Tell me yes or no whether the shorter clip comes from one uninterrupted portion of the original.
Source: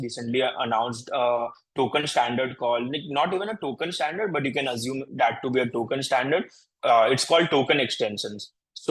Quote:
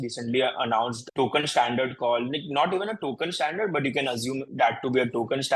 no